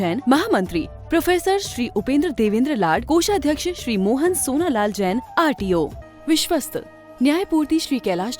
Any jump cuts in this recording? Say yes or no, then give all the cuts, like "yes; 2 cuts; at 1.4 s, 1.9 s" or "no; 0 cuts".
yes; 1 cut; at 6.0 s